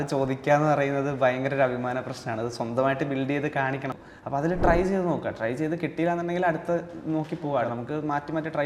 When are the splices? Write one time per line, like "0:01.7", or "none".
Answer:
0:04.0
0:07.7

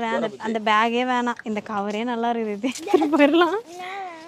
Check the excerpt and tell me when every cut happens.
none

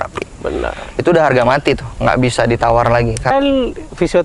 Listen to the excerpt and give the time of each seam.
0:03.3

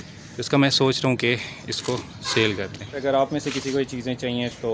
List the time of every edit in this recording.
0:03.0

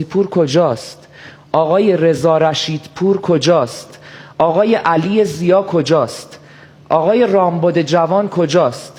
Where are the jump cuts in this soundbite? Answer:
none

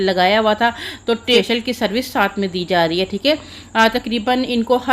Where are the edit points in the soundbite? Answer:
0:01.4

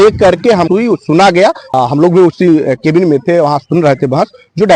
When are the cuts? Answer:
0:01.6

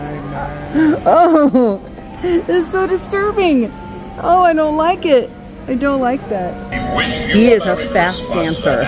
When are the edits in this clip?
0:06.7

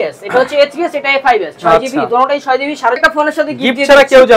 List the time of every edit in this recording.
0:03.0

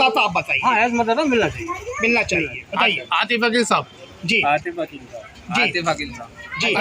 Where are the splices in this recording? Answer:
0:02.6

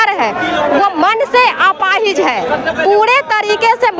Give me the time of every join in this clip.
none

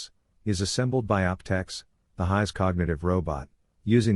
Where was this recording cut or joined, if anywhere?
0:03.0

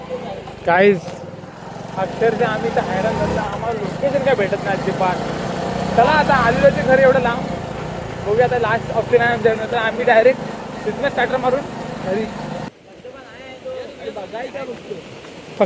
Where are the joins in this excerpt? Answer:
0:12.7

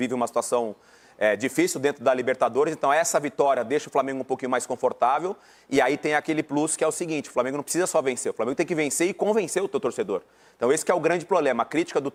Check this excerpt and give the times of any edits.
none

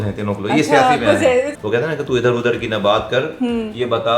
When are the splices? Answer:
0:01.5

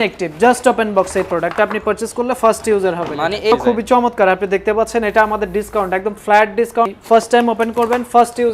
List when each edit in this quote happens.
0:03.5
0:06.9

